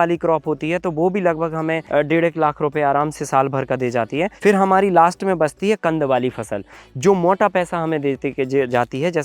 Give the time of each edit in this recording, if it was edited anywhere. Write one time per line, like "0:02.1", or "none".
0:01.8
0:04.3